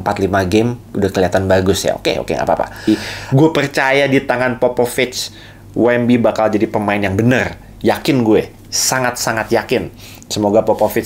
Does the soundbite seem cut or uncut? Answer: cut